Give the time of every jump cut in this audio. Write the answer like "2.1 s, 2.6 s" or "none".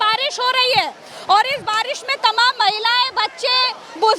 none

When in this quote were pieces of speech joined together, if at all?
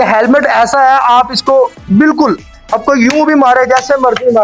none

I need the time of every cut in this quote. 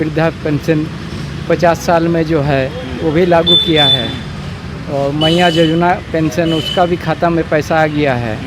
none

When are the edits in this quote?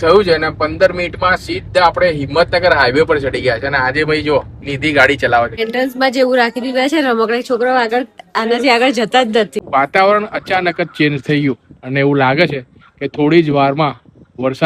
5.6 s, 9.5 s

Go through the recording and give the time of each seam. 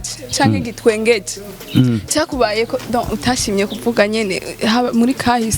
none

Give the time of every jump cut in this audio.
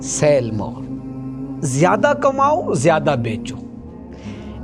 none

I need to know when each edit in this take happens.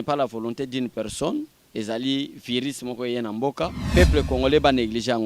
3.8 s

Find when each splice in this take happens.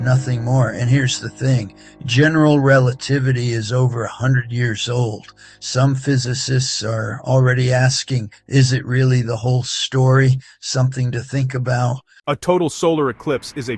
12.1 s

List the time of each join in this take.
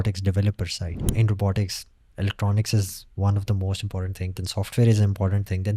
1.0 s

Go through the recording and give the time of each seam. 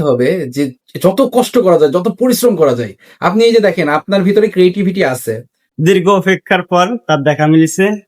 5.7 s

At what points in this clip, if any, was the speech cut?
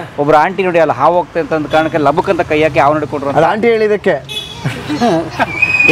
none

